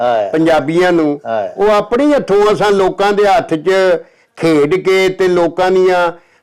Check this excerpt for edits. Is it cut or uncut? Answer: uncut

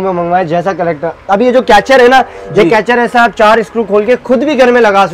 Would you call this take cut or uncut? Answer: uncut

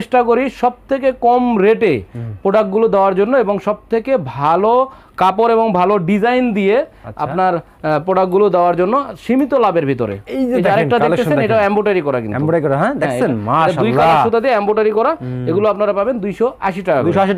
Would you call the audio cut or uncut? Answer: uncut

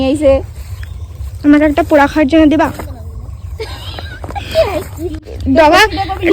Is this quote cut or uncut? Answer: cut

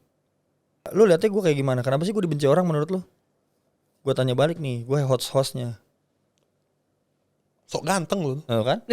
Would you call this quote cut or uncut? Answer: cut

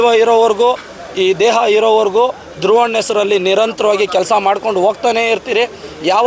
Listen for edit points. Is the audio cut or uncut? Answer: uncut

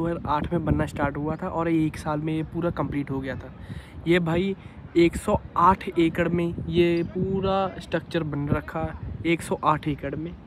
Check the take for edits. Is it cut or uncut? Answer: uncut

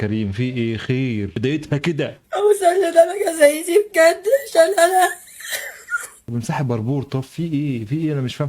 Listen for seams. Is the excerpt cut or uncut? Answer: uncut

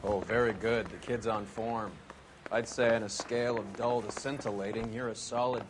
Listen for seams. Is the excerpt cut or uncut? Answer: uncut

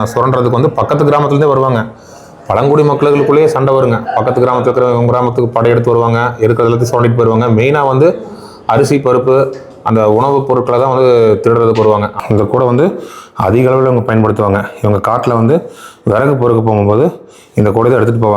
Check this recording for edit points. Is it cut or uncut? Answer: cut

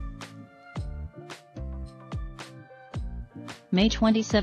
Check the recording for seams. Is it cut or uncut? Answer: uncut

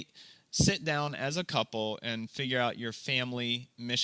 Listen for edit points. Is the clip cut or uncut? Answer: uncut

